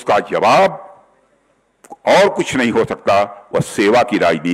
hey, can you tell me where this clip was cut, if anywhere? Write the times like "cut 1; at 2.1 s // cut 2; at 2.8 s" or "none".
none